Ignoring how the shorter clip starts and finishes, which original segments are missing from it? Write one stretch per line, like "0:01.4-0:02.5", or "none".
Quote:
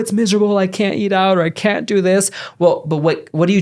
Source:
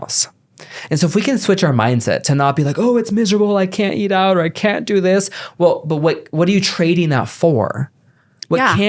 none